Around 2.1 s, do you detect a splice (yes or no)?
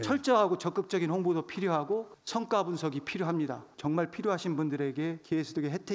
no